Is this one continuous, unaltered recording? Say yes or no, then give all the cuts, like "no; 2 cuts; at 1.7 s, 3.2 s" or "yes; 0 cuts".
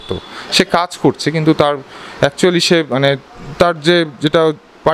yes; 0 cuts